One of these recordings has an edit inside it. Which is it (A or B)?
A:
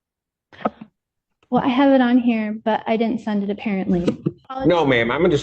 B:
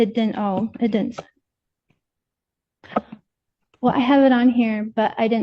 A